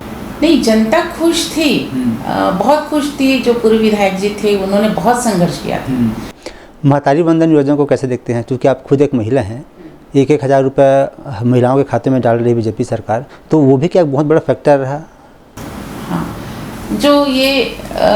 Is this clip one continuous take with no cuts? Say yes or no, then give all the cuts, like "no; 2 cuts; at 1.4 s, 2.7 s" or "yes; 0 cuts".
no; 1 cut; at 6.3 s